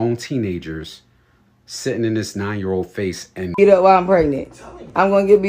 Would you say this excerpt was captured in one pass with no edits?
no; 1 cut; at 3.5 s

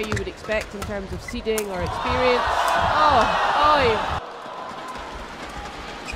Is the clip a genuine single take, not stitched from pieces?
no; 1 cut; at 4.2 s

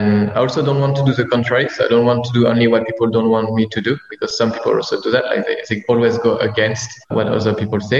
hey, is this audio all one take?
no; 1 cut; at 7.1 s

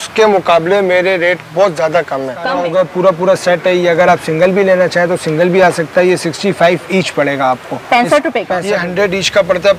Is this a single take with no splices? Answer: no; 2 cuts; at 2.4 s, 8.6 s

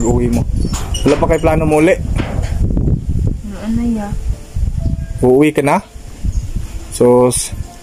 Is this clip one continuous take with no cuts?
yes; 0 cuts

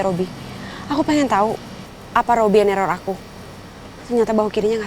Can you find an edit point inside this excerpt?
no; 0 cuts

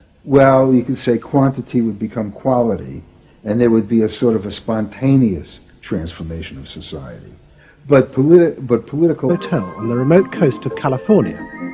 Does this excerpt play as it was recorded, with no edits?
yes; 0 cuts

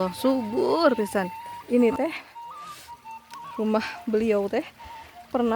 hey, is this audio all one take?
no; 3 cuts; at 1.6 s, 2.3 s, 3.6 s

